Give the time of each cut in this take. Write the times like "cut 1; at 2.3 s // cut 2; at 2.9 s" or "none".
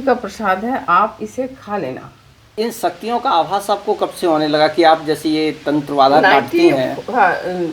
cut 1; at 2.5 s